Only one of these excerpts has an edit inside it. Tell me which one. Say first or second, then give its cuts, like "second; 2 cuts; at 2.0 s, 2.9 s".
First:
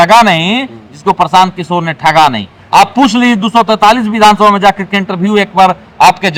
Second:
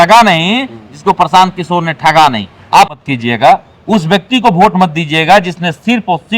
second; 1 cut; at 2.9 s